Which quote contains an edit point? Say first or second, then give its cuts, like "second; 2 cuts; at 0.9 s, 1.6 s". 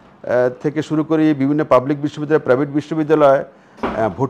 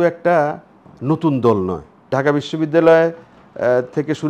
second; 1 cut; at 2.1 s